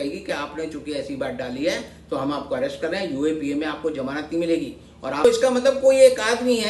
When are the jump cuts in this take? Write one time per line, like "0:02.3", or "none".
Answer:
0:05.2